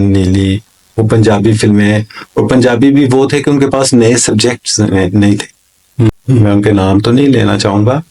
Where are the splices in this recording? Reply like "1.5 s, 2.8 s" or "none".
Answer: 6.2 s